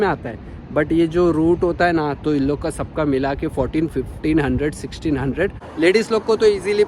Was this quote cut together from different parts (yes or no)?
yes